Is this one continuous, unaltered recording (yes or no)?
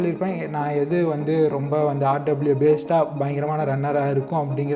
yes